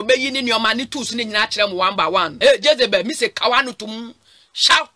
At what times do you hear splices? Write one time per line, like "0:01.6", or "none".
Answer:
0:02.3